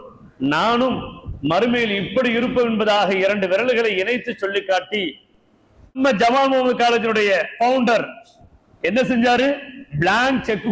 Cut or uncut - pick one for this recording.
cut